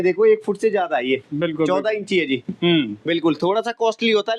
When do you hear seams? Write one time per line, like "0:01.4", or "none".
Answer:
none